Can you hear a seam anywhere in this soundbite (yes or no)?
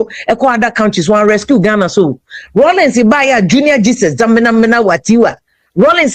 no